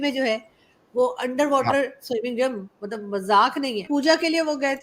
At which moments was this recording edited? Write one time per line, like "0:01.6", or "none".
0:03.9

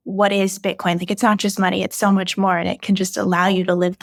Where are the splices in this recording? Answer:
none

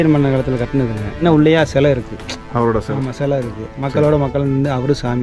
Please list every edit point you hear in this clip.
0:01.2

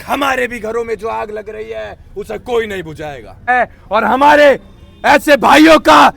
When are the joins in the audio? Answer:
0:03.5

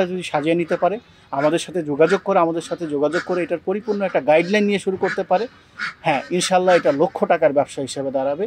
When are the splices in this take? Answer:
none

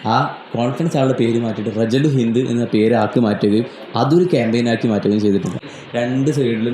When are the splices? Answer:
0:05.6

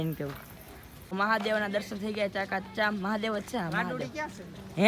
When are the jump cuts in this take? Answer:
0:01.0

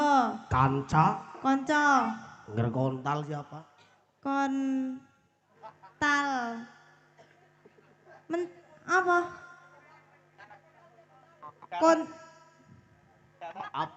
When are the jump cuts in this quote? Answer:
none

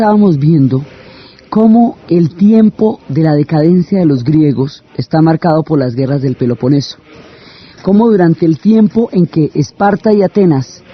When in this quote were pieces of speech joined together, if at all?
none

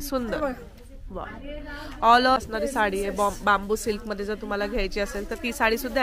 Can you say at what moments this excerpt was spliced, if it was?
0:02.4

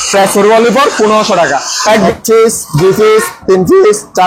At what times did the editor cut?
0:02.1

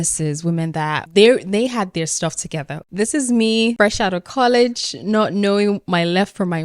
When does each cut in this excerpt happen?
0:03.7

